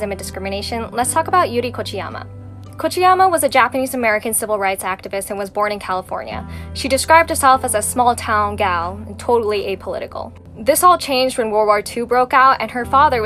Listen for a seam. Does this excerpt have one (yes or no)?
no